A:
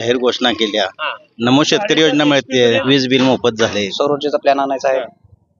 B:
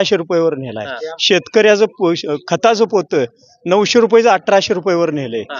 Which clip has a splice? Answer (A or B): A